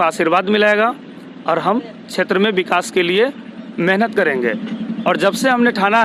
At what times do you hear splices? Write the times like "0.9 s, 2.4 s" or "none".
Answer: none